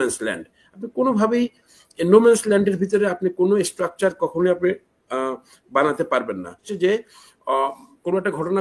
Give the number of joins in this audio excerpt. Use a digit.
1